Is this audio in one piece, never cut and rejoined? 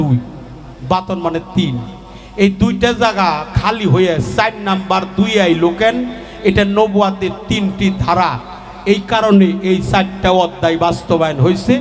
yes; 0 cuts

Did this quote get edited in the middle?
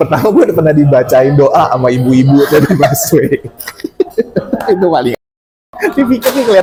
no; 0 cuts

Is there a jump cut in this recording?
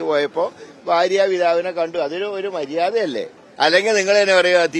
yes; 1 cut; at 3.4 s

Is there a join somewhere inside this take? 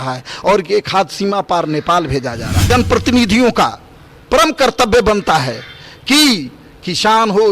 yes; 1 cut; at 2.7 s

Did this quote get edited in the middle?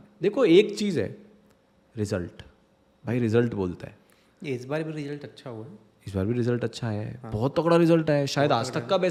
no; 0 cuts

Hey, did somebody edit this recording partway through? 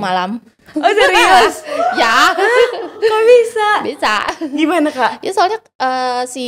no; 0 cuts

